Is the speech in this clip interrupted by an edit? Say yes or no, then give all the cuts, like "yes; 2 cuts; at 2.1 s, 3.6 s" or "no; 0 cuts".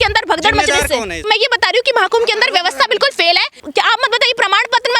yes; 2 cuts; at 1.2 s, 3.5 s